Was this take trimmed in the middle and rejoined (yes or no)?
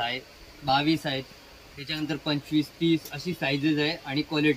no